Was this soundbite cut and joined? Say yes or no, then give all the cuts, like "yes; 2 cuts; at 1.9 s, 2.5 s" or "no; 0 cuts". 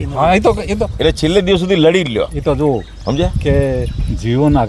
no; 0 cuts